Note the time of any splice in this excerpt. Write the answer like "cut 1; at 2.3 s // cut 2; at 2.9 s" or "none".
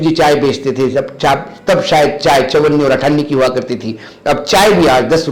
none